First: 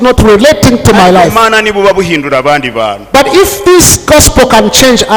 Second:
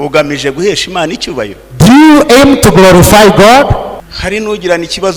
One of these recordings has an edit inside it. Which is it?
second; 1 cut; at 4.0 s

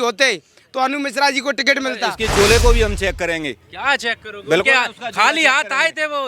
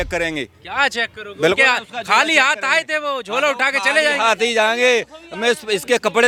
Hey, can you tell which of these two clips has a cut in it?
first; 1 cut; at 2.1 s

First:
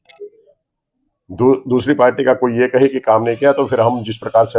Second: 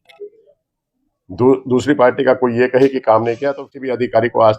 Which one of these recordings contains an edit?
second; 1 cut; at 3.5 s

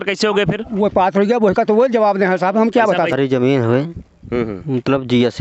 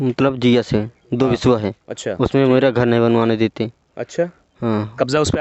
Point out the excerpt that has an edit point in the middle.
first; 1 cut; at 3.1 s

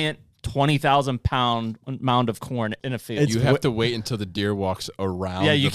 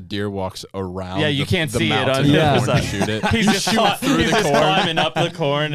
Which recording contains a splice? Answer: first; 2 cuts; at 1.8 s, 2.8 s

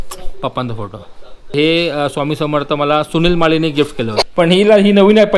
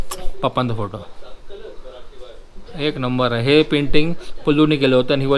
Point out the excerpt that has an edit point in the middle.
first; 2 cuts; at 1.5 s, 4.2 s

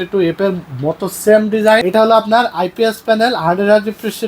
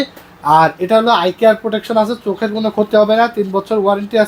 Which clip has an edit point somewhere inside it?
first; 1 cut; at 1.8 s

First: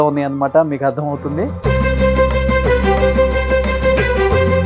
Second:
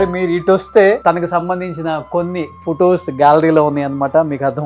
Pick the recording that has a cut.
second; 1 cut; at 1.0 s

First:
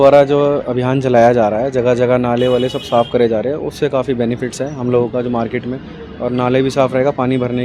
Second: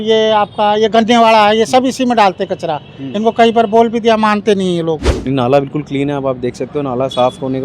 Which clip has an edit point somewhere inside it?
second; 1 cut; at 5.1 s

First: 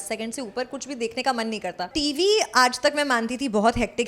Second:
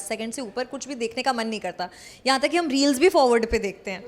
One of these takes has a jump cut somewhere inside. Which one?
first; 1 cut; at 1.9 s

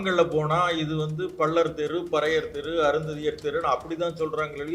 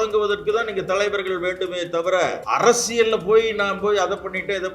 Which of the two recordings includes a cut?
second; 1 cut; at 2.4 s

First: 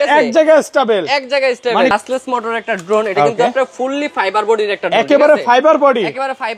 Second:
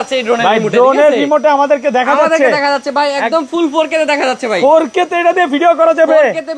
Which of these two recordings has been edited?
first; 1 cut; at 1.9 s

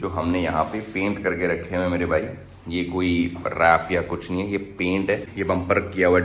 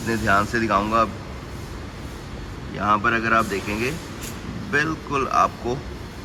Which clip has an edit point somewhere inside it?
first; 1 cut; at 5.3 s

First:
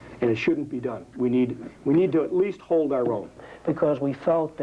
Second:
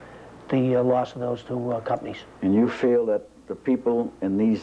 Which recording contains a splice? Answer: first; 1 cut; at 3.5 s

